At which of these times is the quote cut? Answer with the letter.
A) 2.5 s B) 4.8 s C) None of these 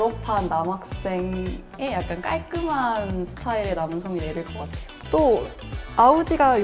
B